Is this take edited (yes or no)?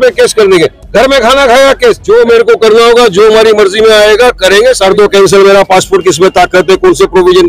yes